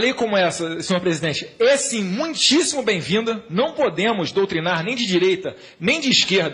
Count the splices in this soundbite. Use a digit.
1